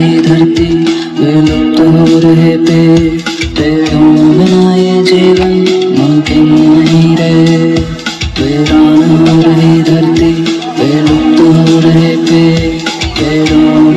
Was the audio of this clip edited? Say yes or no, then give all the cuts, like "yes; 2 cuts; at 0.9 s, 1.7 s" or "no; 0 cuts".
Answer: no; 0 cuts